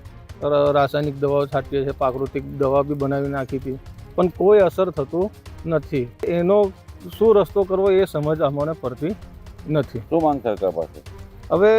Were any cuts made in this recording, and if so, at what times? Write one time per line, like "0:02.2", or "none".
none